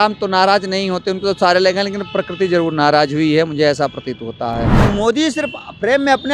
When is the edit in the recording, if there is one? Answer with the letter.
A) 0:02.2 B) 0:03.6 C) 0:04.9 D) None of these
C